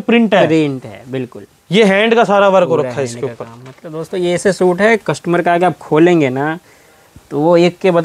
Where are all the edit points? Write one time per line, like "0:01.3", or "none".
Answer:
none